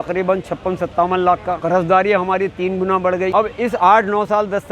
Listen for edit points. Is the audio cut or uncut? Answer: cut